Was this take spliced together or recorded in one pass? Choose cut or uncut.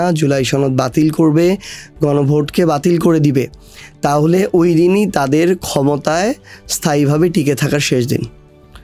uncut